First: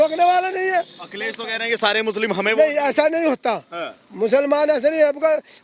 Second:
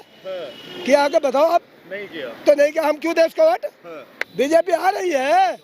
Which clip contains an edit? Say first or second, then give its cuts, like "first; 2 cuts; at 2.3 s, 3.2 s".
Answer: second; 1 cut; at 4.2 s